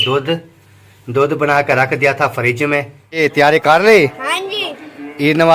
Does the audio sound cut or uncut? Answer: cut